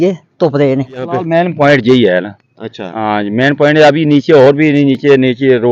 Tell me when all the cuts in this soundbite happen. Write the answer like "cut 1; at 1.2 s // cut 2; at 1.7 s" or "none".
cut 1; at 1.2 s